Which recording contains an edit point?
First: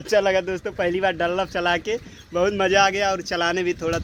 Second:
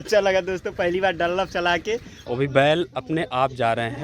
second; 1 cut; at 2.1 s

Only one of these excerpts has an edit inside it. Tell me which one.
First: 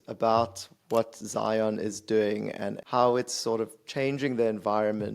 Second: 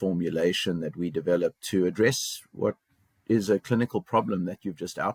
first; 1 cut; at 2.8 s

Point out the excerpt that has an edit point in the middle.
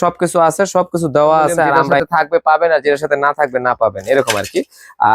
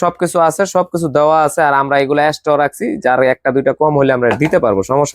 first; 1 cut; at 2.0 s

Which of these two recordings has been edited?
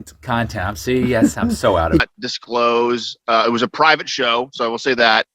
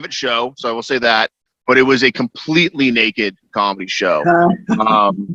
first; 1 cut; at 2.0 s

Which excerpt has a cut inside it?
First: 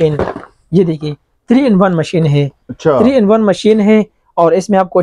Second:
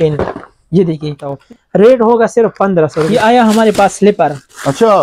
second; 2 cuts; at 1.4 s, 3.0 s

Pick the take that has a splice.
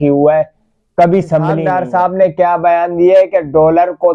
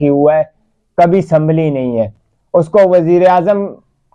first; 1 cut; at 1.6 s

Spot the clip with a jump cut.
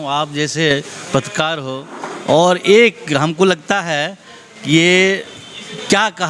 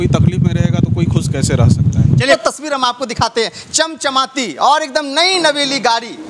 second; 1 cut; at 2.3 s

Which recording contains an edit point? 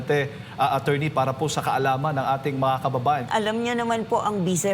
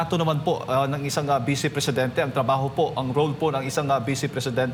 first; 1 cut; at 3.3 s

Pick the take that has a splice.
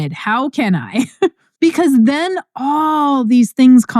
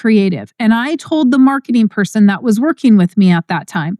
first; 1 cut; at 1.4 s

